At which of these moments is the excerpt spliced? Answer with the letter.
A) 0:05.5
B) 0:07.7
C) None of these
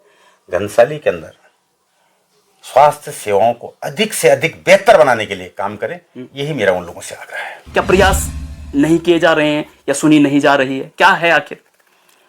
B